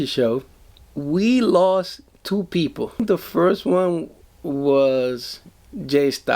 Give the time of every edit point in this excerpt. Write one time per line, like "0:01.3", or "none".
0:03.0

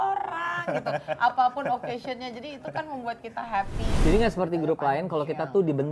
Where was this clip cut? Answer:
0:03.9

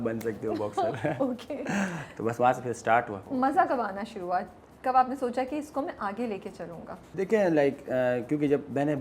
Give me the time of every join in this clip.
none

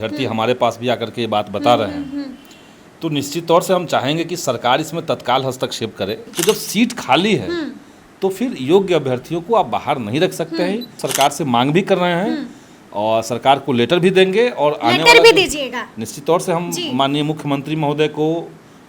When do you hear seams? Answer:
0:06.2
0:11.0

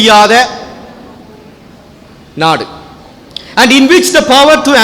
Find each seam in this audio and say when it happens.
none

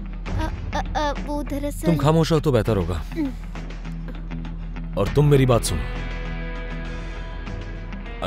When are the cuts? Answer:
none

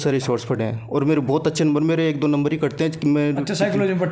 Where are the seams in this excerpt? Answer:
none

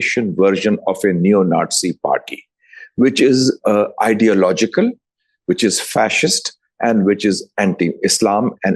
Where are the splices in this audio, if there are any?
none

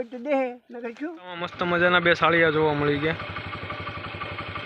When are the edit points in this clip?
0:01.0

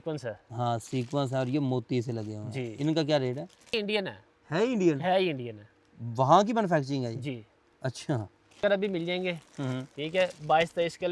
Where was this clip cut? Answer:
0:03.7
0:08.6

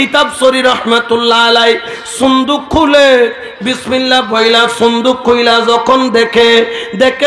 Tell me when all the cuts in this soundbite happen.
none

